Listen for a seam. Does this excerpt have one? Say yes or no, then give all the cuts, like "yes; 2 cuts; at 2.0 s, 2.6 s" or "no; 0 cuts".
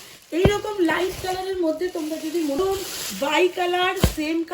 yes; 1 cut; at 2.6 s